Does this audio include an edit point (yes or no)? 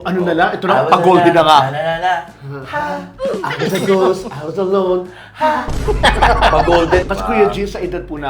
yes